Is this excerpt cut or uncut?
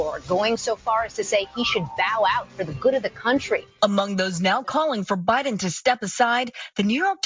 cut